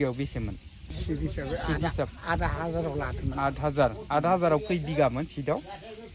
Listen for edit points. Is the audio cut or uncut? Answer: cut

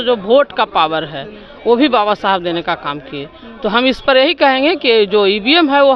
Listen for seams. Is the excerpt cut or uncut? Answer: uncut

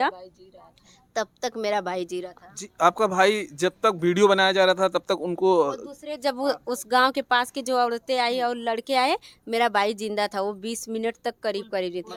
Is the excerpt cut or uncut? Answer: uncut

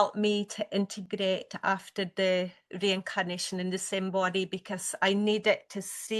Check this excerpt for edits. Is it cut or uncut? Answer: uncut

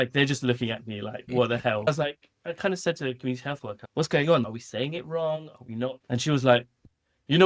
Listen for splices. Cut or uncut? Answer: uncut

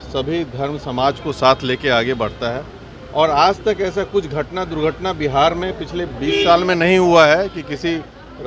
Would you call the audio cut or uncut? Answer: uncut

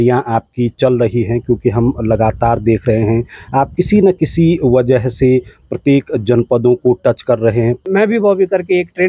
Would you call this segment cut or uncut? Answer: cut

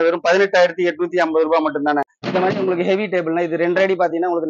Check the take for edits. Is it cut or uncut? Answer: cut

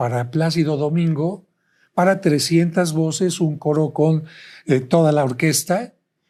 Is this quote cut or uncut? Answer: uncut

